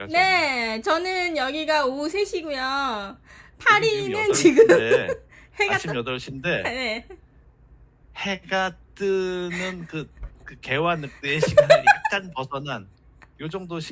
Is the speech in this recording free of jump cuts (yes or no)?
yes